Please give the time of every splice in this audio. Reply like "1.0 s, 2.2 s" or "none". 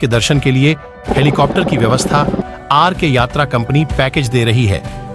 2.4 s